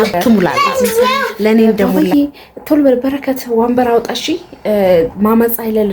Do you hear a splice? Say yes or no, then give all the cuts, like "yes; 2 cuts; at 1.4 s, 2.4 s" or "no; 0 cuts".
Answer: yes; 1 cut; at 1.9 s